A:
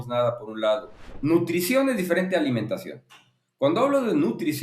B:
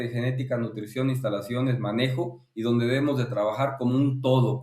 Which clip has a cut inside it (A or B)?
A